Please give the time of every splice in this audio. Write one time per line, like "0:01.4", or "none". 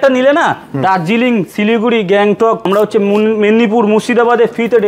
0:02.6